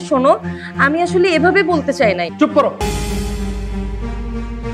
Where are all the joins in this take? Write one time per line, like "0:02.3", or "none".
0:02.3